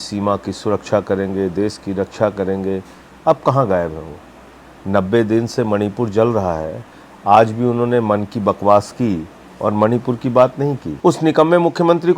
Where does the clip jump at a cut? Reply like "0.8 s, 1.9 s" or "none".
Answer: 10.9 s